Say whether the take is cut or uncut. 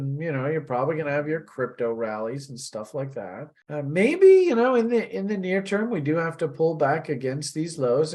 uncut